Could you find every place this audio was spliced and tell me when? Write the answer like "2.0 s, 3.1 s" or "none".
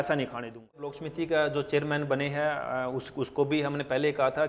1.0 s

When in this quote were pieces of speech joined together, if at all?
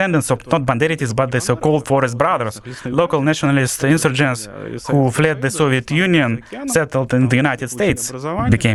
none

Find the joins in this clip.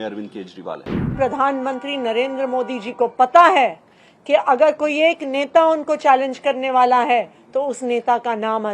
1.0 s

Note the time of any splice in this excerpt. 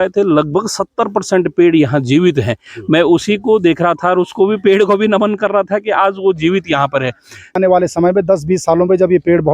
7.5 s

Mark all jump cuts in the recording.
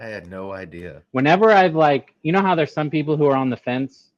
1.0 s

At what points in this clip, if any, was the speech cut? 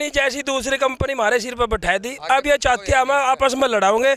none

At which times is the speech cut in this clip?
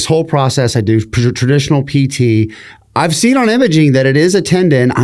none

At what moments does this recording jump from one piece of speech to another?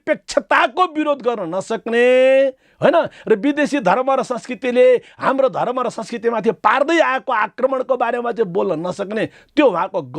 none

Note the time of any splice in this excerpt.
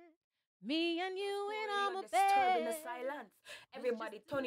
2.8 s

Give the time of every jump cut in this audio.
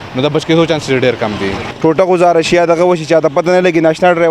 1.6 s

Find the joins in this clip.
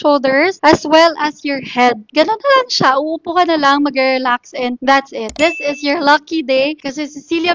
2.1 s, 5.3 s

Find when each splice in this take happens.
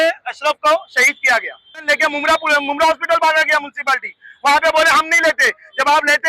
1.8 s

